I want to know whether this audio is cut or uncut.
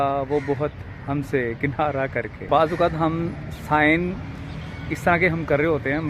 cut